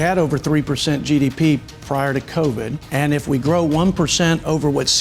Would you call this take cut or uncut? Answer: cut